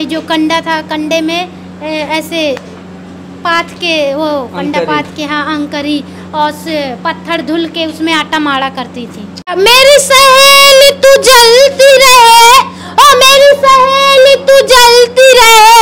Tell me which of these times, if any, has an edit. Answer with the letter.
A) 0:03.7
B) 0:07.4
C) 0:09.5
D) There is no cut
C